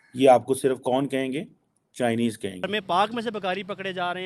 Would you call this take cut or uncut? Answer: cut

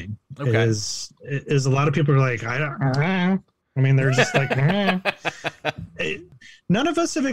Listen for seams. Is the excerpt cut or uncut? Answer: cut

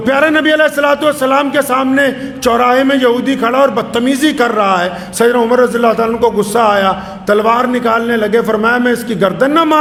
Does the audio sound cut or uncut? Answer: uncut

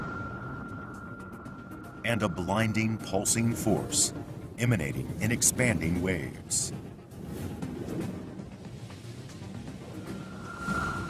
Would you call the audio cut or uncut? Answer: uncut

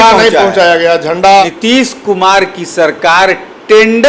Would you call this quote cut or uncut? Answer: cut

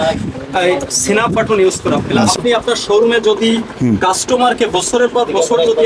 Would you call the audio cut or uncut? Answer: cut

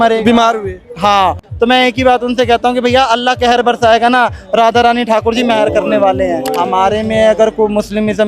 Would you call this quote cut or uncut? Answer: cut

